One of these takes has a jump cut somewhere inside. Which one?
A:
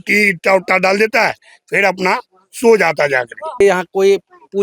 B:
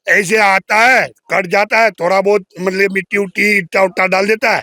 A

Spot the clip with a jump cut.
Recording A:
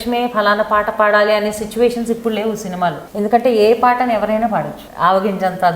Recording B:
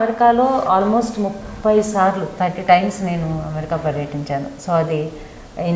A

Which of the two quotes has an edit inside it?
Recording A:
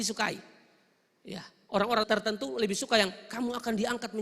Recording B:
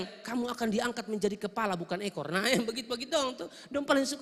A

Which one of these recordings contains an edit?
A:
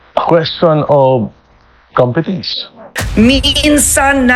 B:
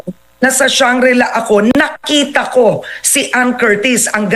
A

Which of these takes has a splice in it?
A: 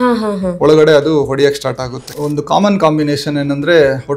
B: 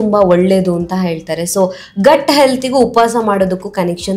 A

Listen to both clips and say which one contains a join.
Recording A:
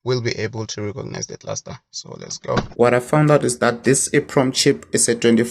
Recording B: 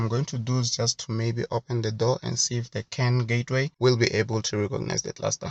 A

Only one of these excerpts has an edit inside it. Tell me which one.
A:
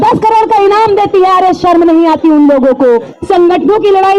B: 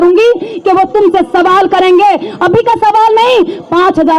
A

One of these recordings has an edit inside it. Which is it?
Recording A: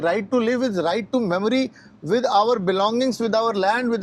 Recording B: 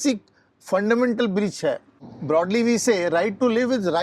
B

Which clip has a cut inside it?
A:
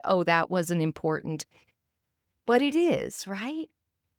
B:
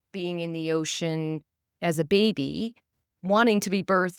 B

